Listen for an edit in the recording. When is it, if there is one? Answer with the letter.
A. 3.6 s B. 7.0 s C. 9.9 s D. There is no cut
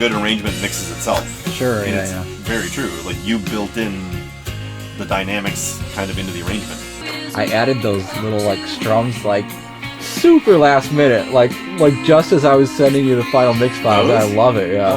B